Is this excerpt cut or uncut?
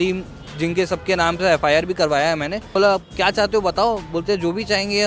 cut